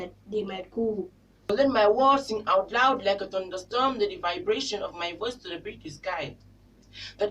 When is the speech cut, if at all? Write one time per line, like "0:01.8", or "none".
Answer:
0:01.5